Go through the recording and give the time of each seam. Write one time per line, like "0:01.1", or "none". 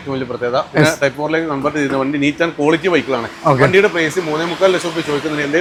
none